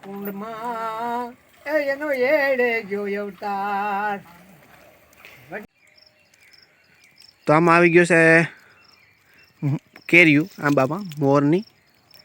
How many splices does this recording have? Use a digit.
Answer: 1